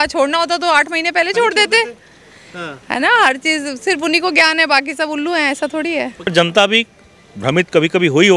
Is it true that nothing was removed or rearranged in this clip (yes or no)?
no